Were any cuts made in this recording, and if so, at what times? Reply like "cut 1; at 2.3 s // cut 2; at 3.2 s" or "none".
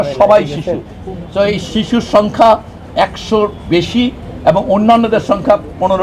none